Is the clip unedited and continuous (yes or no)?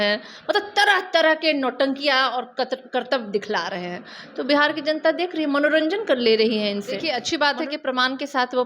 no